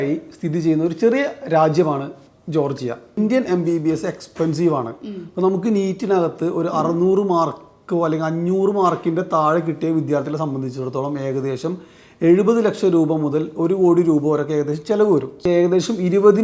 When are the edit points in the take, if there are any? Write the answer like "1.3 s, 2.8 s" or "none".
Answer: 3.1 s, 15.5 s